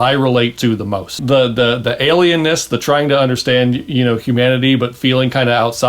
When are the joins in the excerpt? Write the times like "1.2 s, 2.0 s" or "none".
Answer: 1.2 s